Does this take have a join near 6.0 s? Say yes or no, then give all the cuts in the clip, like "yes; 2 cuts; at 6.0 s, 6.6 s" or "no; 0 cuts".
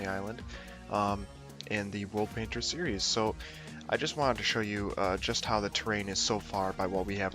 yes; 1 cut; at 6.0 s